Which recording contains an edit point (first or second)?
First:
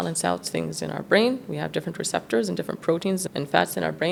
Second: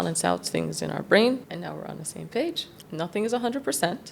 second